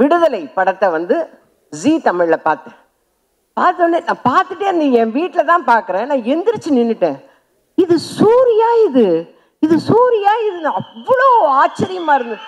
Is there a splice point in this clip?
no; 0 cuts

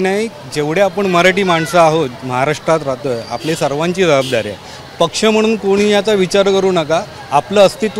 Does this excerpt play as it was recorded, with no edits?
yes; 0 cuts

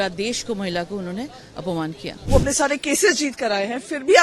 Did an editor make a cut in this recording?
yes; 1 cut; at 2.1 s

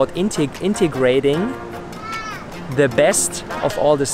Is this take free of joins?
yes; 0 cuts

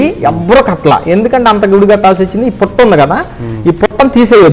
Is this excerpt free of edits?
yes; 0 cuts

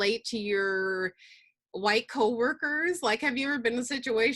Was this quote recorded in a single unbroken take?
yes; 0 cuts

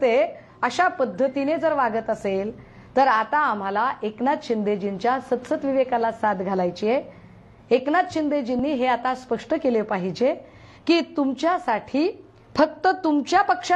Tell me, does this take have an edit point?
no; 0 cuts

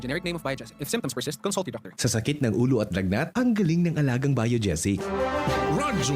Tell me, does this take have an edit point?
yes; 1 cut; at 5.0 s

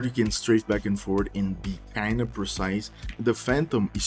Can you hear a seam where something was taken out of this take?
yes; 1 cut; at 3.1 s

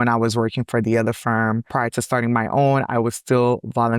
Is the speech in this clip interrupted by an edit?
yes; 1 cut; at 1.7 s

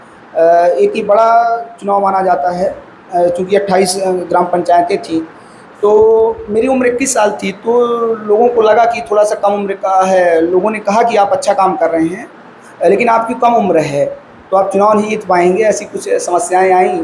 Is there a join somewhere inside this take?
no; 0 cuts

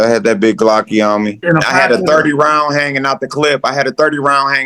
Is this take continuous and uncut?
no; 1 cut; at 1.4 s

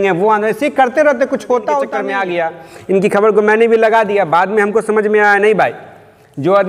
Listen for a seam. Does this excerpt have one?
yes; 1 cut; at 2.0 s

